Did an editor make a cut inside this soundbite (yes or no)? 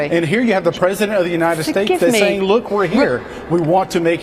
no